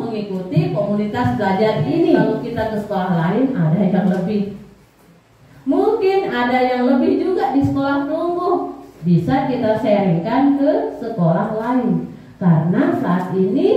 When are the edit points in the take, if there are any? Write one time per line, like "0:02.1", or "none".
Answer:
0:02.4